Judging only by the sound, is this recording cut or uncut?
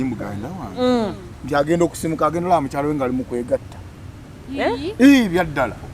uncut